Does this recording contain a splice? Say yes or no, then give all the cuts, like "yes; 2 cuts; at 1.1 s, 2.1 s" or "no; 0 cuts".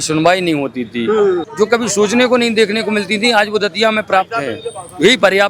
yes; 1 cut; at 1.4 s